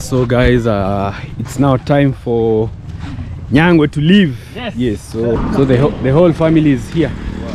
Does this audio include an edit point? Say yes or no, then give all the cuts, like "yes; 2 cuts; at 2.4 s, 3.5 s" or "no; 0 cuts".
yes; 1 cut; at 5.4 s